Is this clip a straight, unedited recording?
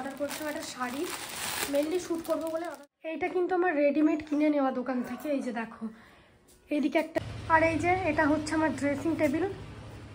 no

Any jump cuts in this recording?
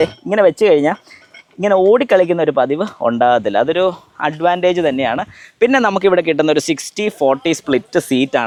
no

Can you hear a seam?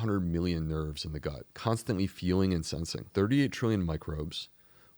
yes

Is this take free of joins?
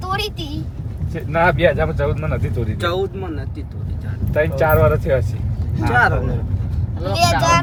yes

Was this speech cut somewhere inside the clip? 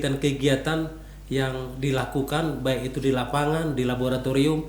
no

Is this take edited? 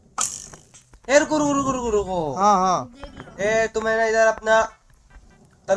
no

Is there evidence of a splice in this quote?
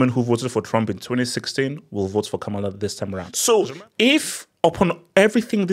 yes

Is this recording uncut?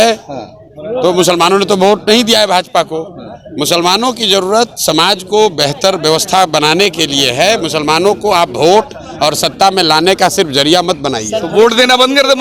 yes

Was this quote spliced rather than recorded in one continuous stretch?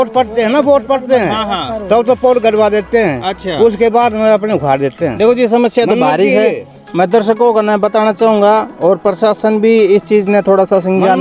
no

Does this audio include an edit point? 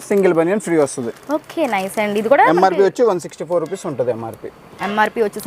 no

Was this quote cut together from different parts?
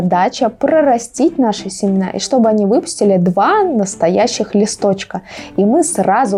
no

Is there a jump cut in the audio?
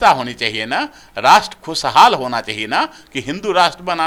no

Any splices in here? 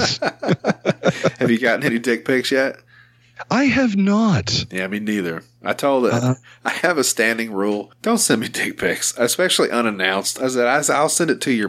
yes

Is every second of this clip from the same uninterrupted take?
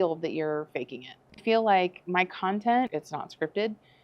no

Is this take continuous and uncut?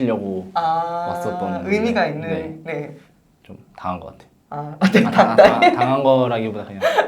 no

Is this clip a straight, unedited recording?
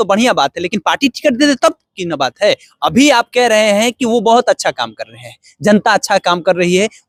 yes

